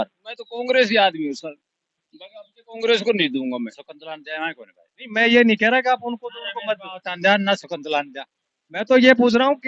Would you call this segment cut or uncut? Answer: cut